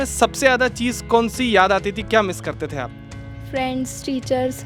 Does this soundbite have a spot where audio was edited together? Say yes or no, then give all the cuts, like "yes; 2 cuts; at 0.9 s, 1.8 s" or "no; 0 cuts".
no; 0 cuts